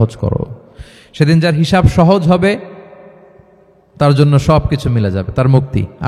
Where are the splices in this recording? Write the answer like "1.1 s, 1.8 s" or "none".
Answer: none

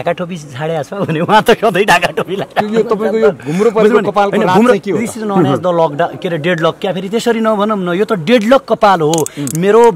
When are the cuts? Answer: none

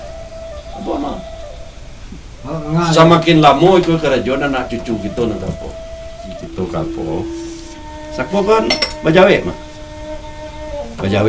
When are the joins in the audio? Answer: 7.6 s

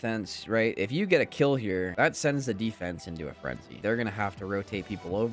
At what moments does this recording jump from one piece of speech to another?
1.9 s

